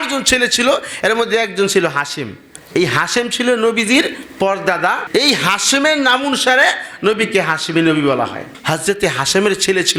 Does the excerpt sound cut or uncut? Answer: uncut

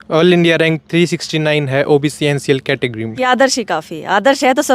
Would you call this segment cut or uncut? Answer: cut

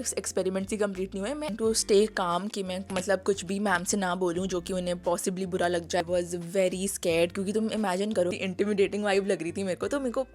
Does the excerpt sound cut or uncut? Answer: cut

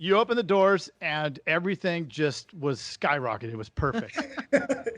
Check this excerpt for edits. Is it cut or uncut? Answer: uncut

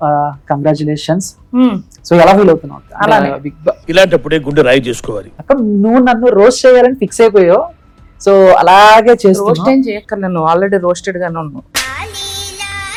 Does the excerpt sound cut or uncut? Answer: uncut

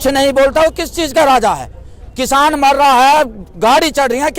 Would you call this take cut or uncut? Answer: uncut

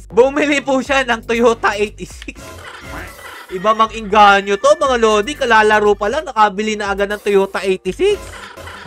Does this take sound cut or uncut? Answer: uncut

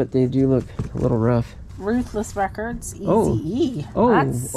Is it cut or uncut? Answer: cut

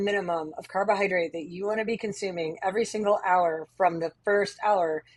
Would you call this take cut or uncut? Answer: uncut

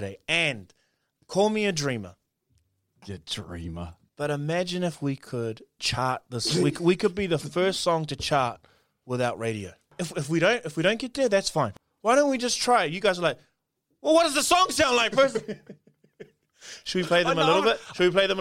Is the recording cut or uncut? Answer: cut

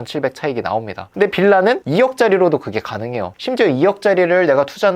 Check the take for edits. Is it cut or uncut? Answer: cut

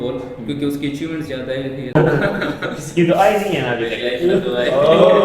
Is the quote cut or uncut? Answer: cut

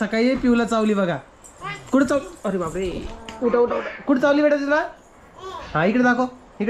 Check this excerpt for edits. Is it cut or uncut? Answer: uncut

